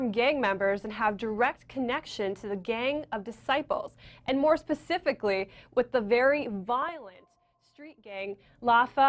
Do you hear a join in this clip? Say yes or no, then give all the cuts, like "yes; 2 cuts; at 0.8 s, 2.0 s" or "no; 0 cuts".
no; 0 cuts